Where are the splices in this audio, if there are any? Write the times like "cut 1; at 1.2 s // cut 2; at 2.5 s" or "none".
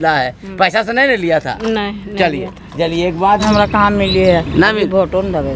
cut 1; at 3.4 s